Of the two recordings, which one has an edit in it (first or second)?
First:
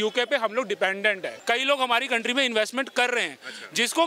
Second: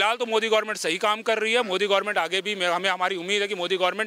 first